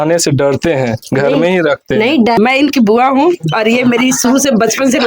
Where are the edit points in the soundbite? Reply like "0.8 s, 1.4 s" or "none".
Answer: 2.4 s